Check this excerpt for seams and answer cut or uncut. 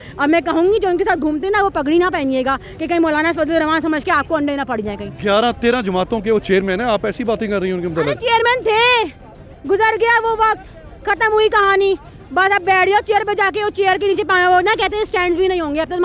uncut